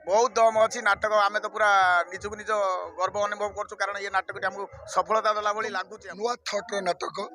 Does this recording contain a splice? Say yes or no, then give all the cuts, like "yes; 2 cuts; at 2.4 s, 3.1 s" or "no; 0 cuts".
yes; 1 cut; at 5.9 s